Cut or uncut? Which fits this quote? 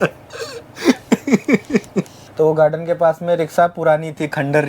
uncut